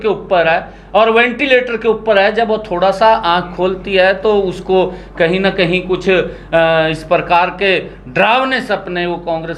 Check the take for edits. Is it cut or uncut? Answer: uncut